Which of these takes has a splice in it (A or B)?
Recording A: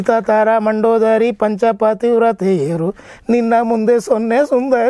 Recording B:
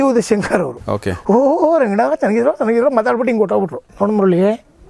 B